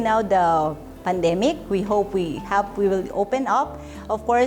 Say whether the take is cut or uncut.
uncut